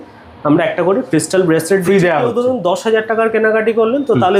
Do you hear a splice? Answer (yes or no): no